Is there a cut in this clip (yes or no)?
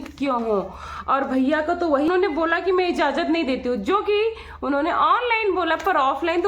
yes